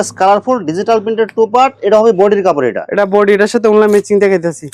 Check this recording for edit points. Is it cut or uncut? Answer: uncut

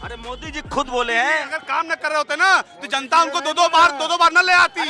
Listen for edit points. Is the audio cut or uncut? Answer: uncut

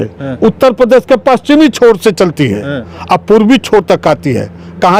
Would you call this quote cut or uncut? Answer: uncut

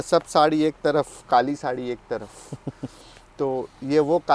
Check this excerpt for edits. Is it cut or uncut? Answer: uncut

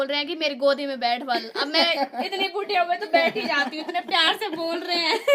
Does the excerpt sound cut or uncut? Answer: uncut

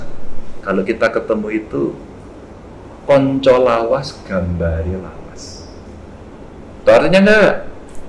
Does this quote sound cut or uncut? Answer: uncut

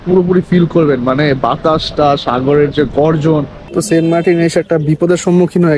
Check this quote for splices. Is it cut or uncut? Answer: cut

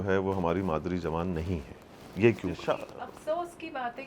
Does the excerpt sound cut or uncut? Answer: cut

